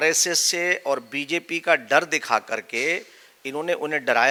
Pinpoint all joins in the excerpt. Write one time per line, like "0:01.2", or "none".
none